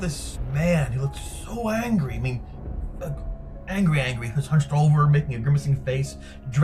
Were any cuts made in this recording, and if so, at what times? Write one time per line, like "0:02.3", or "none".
none

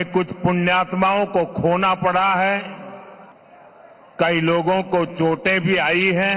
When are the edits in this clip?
0:02.2

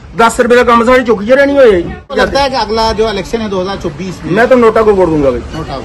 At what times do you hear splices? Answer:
0:02.2

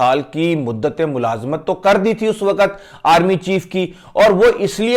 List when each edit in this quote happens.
none

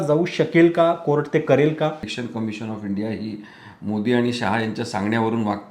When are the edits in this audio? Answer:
0:02.1

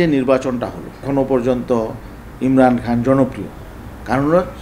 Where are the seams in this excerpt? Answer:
0:01.1

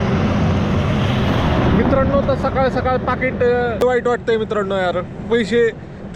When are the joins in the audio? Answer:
0:03.8

